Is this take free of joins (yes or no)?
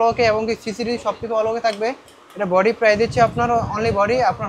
yes